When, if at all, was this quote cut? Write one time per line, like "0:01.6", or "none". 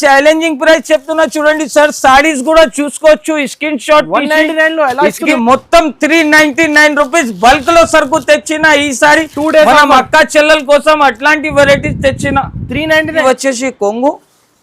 0:05.3
0:13.2